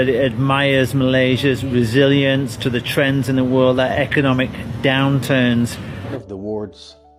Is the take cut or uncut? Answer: cut